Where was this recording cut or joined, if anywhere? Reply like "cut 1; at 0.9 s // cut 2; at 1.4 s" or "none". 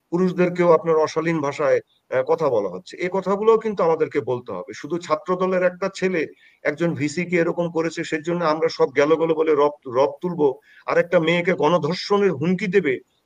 none